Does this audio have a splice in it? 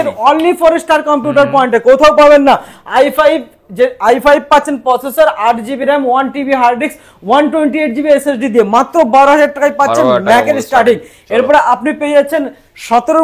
no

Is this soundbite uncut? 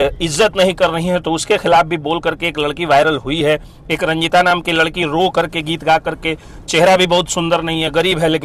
yes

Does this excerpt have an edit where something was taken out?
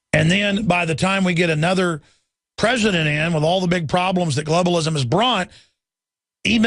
no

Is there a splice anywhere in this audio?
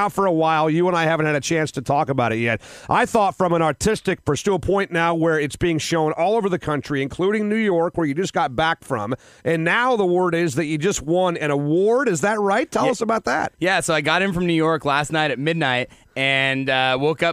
no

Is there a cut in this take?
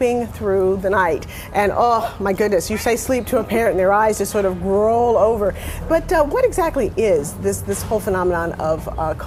no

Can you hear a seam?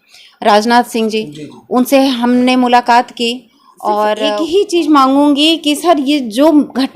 yes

